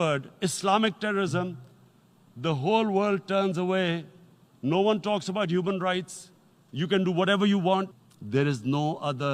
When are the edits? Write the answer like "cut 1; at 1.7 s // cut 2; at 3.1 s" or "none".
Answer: cut 1; at 7.9 s

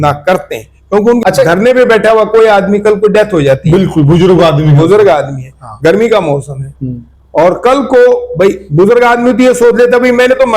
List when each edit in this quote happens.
cut 1; at 1.2 s

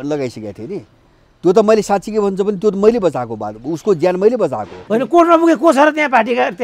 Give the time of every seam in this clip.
cut 1; at 4.7 s

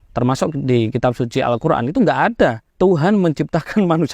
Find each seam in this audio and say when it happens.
cut 1; at 2.6 s

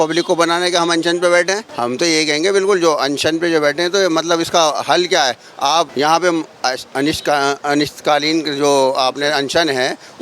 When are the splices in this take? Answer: cut 1; at 1.7 s // cut 2; at 5.9 s

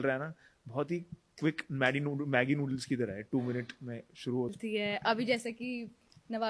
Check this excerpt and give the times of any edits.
cut 1; at 4.5 s

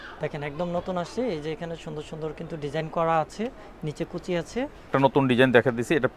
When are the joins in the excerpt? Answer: cut 1; at 4.9 s

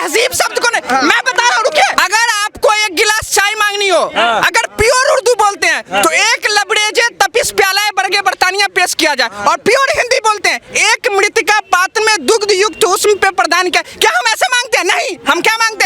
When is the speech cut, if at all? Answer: cut 1; at 1.9 s

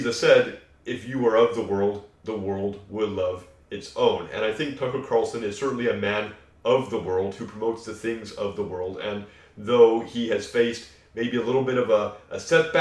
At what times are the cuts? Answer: none

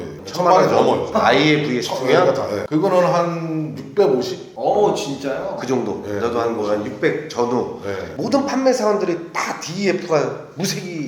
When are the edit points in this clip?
cut 1; at 1.1 s // cut 2; at 2.6 s

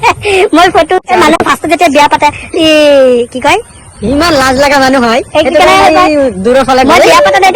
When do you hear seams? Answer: cut 1; at 1.1 s

